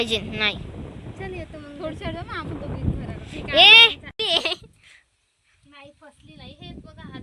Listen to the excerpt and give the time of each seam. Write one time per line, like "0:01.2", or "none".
0:04.1

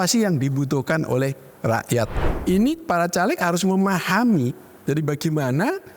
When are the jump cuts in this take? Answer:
0:02.2

